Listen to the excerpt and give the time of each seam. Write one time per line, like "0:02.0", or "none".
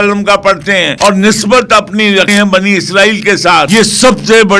0:00.9
0:02.3
0:03.7